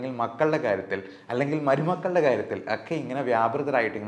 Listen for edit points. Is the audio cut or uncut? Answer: uncut